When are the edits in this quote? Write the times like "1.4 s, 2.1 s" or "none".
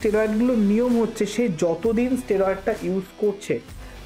none